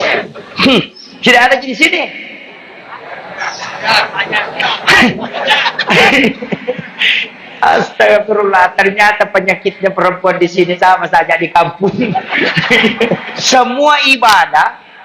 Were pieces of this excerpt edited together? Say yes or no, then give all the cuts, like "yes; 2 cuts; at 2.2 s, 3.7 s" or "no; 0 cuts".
yes; 1 cut; at 13.3 s